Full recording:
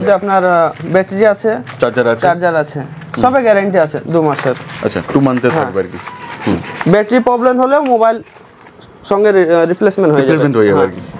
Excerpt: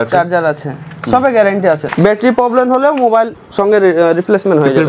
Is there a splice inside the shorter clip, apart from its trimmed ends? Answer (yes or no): yes